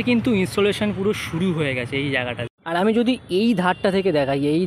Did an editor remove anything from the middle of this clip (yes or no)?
yes